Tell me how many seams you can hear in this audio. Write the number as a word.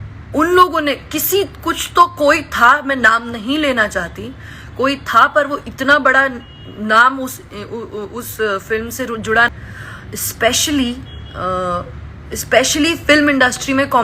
one